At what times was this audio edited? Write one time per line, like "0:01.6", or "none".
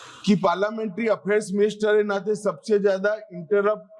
none